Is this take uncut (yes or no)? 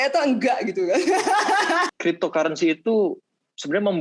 no